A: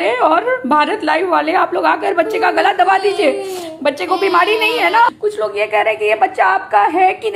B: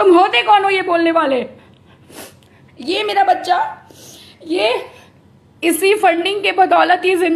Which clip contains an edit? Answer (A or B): A